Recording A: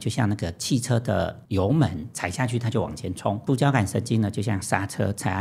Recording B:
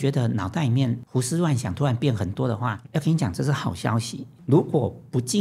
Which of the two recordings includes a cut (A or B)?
B